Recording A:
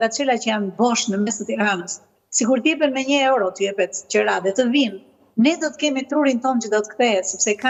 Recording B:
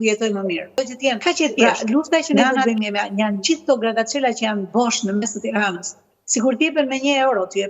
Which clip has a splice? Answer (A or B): B